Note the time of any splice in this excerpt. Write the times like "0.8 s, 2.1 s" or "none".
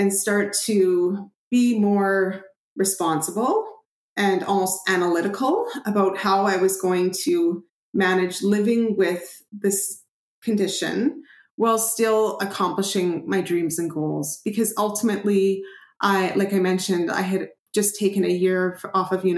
none